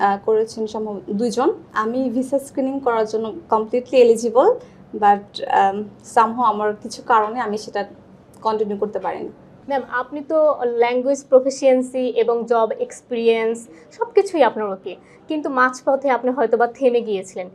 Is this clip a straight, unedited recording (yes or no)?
yes